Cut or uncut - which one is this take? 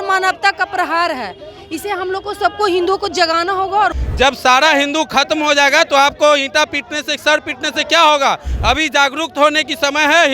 cut